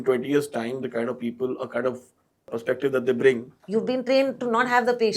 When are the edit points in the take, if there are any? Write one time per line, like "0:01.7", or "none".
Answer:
0:02.5
0:03.5